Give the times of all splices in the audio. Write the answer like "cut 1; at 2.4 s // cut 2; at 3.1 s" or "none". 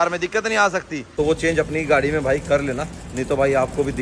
cut 1; at 1.0 s